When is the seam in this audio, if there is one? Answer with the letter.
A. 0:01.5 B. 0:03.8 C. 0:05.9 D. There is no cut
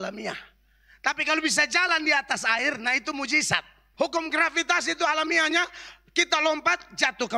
B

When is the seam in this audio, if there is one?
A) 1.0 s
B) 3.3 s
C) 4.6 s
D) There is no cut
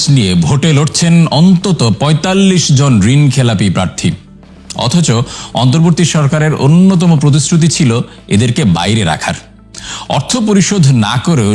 D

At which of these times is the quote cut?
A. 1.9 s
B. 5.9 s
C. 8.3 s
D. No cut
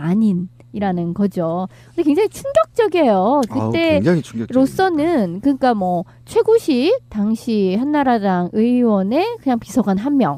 D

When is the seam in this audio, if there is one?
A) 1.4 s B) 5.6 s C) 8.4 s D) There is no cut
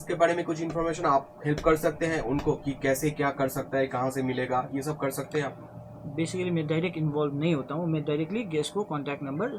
D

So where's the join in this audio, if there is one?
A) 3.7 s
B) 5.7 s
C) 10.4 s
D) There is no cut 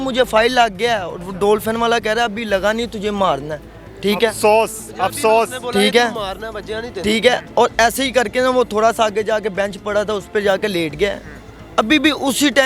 D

